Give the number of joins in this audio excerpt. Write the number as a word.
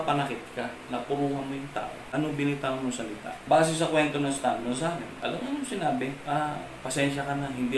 four